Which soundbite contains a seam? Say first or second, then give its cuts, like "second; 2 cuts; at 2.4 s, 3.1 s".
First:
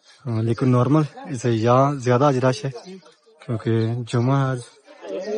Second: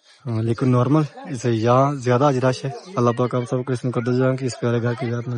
second; 1 cut; at 2.8 s